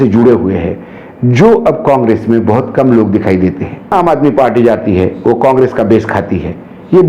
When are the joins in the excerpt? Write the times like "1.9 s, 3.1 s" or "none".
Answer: 3.9 s